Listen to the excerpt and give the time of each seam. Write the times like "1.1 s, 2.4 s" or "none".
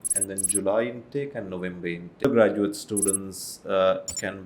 2.2 s